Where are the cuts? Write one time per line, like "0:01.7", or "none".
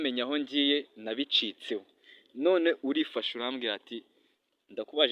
none